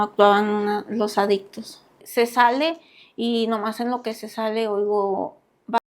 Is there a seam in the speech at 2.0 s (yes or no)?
yes